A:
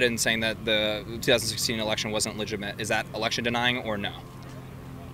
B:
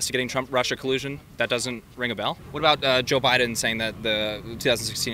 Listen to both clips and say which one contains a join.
B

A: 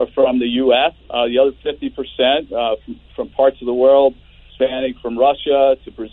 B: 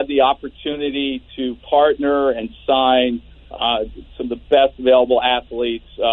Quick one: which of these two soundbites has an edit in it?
A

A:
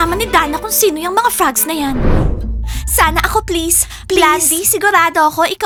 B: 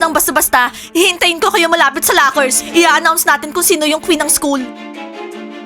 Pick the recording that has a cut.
B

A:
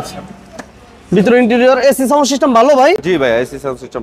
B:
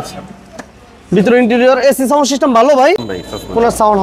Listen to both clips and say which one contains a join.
B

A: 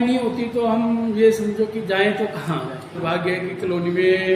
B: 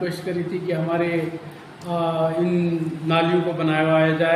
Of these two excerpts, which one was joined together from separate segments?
A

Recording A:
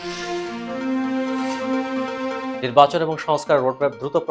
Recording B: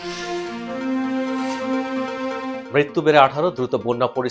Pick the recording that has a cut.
B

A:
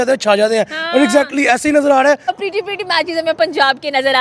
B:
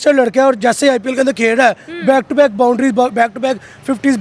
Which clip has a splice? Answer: A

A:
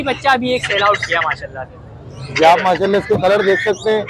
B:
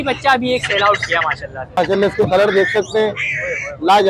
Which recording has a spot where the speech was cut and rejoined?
B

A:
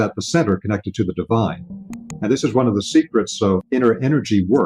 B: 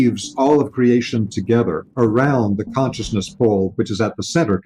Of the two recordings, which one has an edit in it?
A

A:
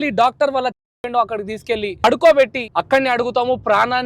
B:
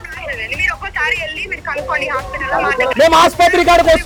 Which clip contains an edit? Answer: A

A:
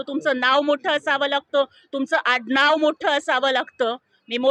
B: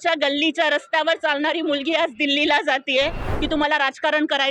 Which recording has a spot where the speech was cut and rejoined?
B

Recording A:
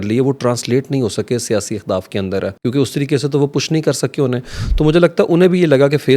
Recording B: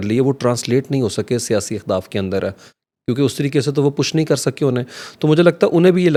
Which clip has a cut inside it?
A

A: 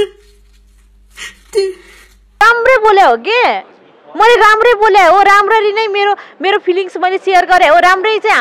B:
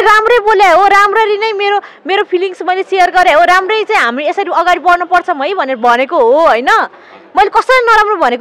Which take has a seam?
A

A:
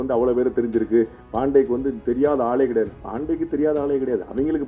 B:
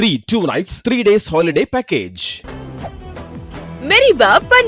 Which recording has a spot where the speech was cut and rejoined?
B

